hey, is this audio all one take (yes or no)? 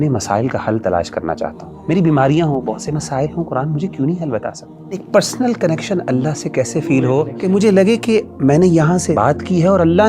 no